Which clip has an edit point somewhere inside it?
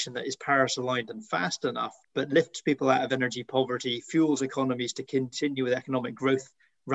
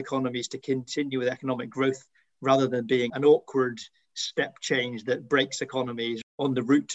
first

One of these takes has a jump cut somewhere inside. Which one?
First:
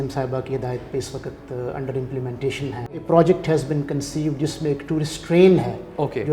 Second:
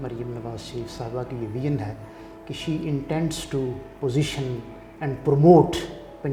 first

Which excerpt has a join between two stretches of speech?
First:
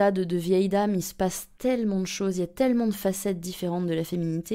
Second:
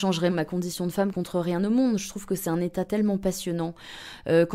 second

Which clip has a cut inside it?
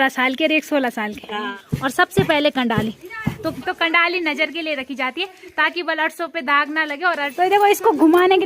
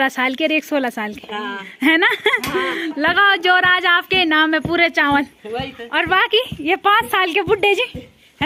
first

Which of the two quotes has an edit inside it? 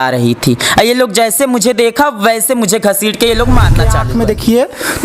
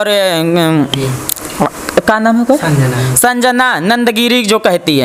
first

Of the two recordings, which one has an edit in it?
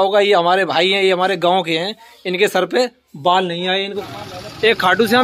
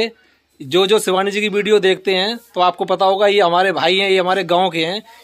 first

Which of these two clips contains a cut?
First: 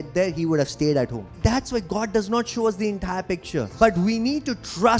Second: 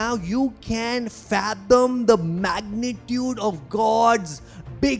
first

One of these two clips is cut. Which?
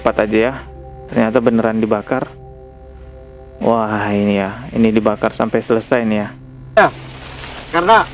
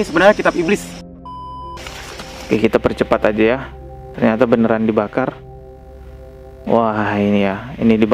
second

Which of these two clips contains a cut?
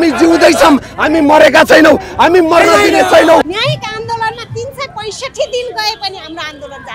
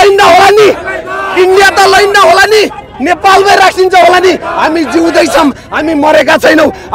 first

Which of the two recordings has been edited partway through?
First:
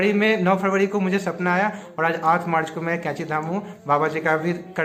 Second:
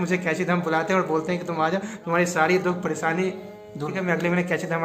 second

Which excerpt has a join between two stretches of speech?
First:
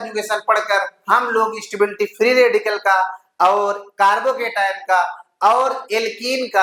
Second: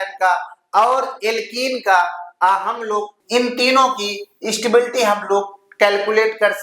second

